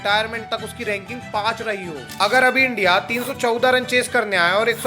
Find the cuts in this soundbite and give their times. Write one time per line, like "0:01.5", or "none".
0:02.0